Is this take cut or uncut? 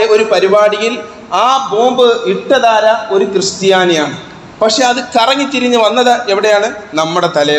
uncut